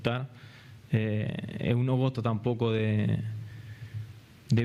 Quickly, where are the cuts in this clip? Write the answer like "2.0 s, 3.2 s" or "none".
none